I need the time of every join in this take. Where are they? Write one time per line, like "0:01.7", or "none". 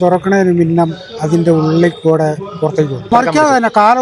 0:03.0